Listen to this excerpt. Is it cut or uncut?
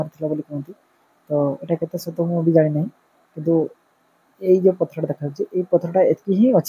uncut